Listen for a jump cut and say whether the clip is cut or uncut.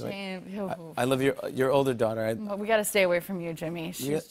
uncut